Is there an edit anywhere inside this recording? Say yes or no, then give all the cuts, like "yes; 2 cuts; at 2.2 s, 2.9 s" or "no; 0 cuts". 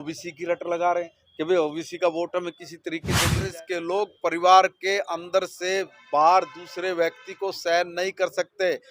yes; 1 cut; at 3.4 s